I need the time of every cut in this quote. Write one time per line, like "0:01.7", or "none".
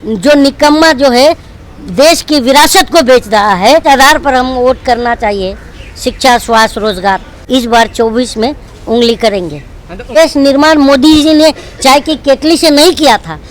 0:03.8
0:07.3
0:10.1